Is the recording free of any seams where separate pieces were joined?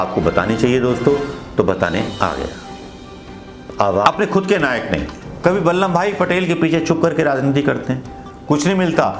no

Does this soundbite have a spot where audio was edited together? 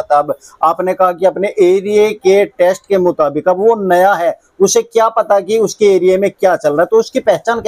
no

